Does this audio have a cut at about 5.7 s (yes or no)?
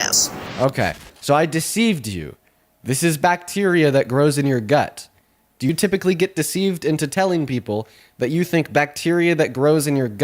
yes